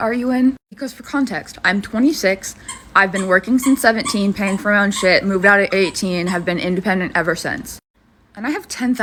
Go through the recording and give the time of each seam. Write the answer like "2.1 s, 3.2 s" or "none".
none